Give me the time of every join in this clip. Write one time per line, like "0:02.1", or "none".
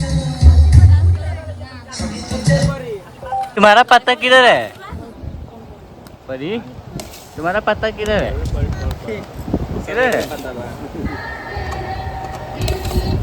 0:03.5